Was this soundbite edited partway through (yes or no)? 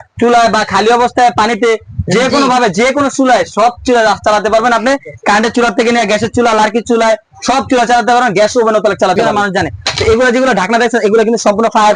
yes